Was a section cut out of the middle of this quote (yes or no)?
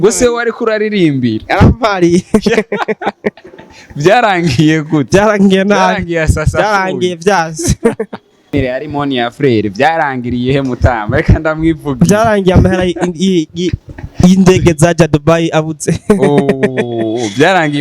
yes